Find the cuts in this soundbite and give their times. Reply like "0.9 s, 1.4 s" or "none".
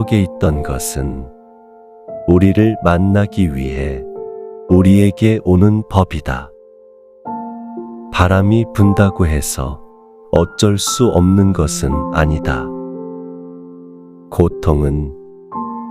12.5 s, 14.2 s